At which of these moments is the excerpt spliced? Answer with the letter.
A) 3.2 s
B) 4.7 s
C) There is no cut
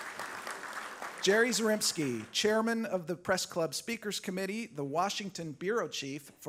C